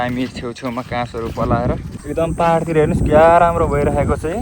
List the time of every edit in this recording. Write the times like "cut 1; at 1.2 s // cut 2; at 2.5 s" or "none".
cut 1; at 1.9 s